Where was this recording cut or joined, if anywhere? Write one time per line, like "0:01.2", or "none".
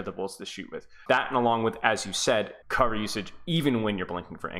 0:01.0
0:02.6